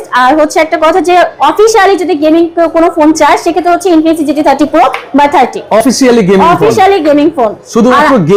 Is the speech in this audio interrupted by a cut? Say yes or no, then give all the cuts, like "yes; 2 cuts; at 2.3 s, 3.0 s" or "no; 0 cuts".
no; 0 cuts